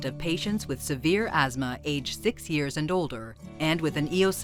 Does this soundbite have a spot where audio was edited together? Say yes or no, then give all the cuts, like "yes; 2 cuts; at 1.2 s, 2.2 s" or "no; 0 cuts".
no; 0 cuts